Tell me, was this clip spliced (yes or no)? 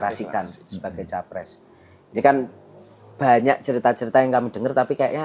no